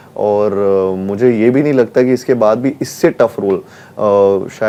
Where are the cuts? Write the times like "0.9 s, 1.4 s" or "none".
none